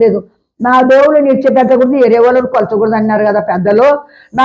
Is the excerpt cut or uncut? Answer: uncut